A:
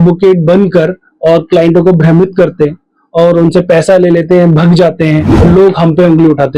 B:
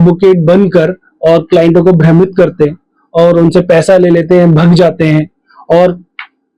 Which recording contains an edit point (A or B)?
A